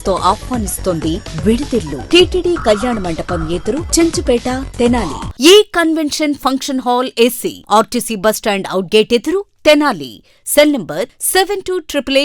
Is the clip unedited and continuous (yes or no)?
no